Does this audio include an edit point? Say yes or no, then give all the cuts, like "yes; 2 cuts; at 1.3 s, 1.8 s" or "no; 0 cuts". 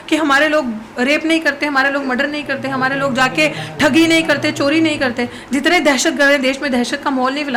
no; 0 cuts